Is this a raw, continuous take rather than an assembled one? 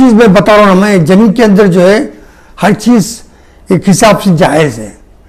yes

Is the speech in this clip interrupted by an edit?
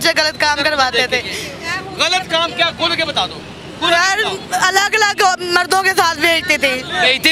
no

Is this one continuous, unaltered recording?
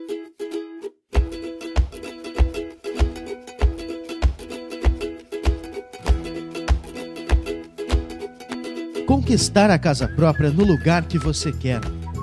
no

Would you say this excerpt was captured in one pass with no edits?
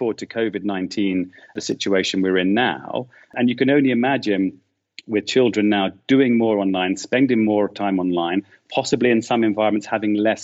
no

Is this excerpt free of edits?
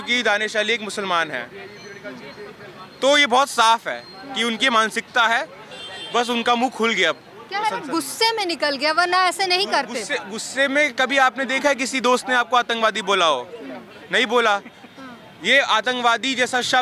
yes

